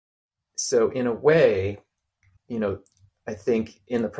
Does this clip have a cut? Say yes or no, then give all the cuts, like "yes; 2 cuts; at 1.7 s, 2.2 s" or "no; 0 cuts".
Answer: yes; 1 cut; at 2.3 s